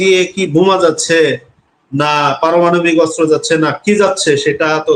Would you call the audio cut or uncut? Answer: uncut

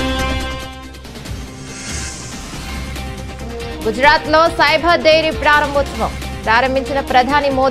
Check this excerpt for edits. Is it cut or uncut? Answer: uncut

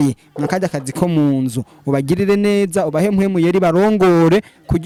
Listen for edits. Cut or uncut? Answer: uncut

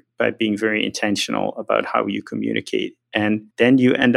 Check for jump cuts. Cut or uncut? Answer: cut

